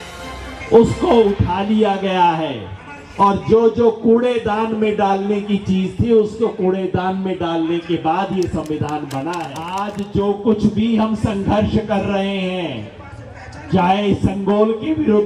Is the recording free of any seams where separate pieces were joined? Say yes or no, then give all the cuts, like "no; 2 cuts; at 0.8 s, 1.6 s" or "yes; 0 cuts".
no; 1 cut; at 9.8 s